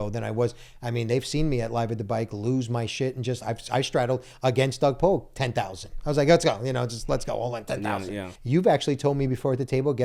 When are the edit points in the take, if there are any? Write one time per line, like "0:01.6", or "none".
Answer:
0:08.3